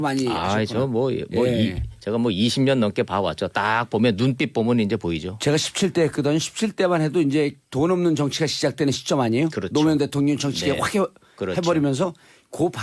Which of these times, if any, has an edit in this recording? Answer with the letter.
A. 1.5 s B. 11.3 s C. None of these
B